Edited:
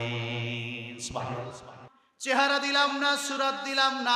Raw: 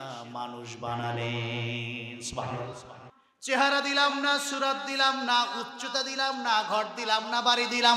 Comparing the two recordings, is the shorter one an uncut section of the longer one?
yes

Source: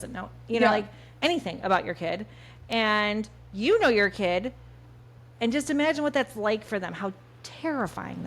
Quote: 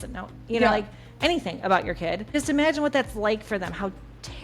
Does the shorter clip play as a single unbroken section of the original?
no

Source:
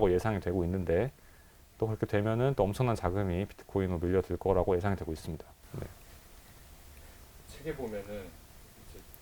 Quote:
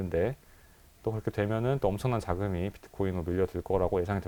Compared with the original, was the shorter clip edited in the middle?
no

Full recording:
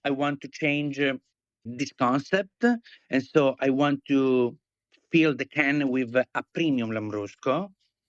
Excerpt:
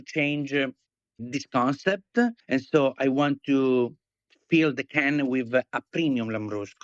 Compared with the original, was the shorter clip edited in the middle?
yes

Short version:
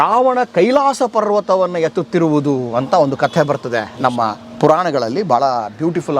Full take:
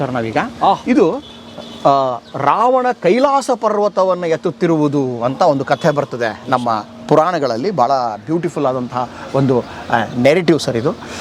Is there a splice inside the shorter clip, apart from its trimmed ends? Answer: no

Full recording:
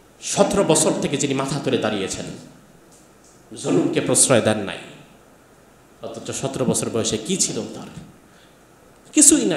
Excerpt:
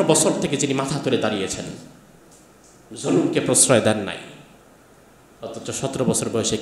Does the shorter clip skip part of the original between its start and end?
no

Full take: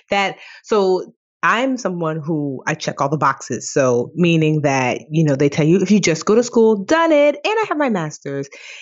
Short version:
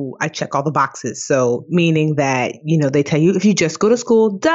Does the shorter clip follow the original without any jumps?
yes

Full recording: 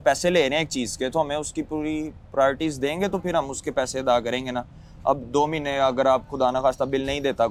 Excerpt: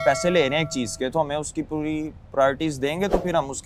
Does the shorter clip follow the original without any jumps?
yes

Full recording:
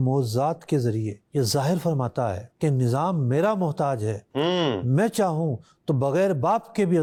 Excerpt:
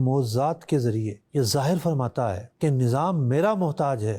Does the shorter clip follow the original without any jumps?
yes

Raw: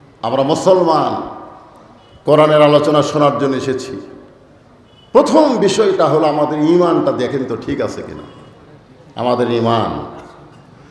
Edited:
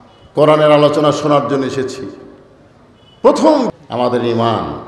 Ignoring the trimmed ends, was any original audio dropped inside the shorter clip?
yes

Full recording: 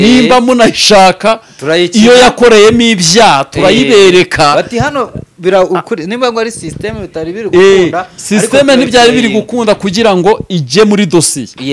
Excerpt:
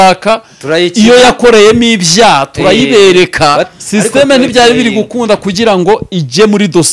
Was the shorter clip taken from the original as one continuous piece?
no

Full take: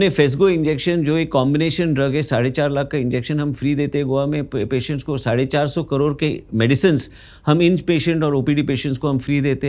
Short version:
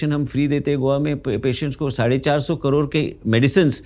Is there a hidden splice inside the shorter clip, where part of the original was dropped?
no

